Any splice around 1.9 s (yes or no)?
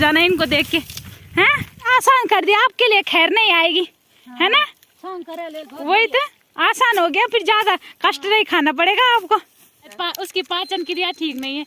yes